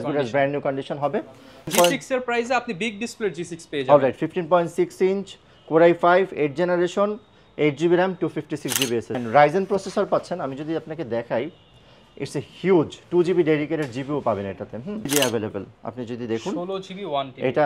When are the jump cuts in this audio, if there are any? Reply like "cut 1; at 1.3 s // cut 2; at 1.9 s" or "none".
cut 1; at 1.7 s // cut 2; at 9.1 s // cut 3; at 15.1 s